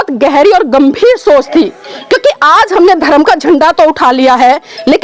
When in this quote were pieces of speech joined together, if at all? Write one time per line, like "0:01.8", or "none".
none